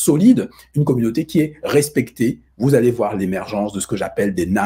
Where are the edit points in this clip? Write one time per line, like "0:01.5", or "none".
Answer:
none